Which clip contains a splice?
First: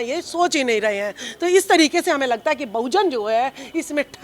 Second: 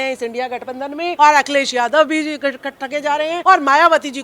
second; 2 cuts; at 1.1 s, 3.4 s

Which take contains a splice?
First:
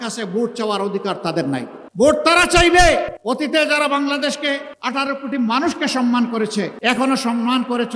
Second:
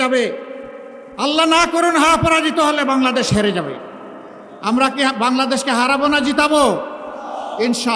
first; 4 cuts; at 1.8 s, 3.1 s, 4.7 s, 6.7 s

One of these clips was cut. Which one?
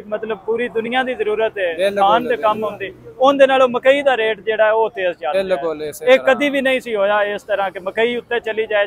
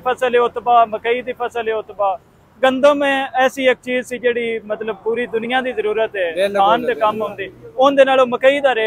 first; 1 cut; at 5.2 s

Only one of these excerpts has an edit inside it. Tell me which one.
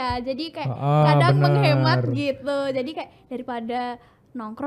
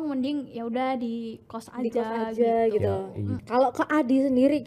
second; 1 cut; at 3.4 s

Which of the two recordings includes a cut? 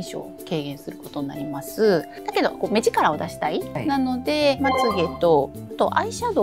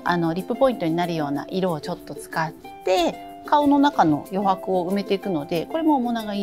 first; 2 cuts; at 2.2 s, 4.6 s

